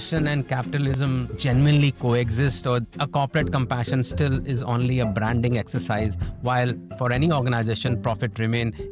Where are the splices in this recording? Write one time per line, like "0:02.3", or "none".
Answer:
0:01.0